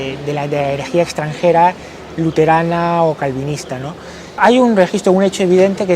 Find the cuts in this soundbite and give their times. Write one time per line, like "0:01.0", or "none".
0:04.4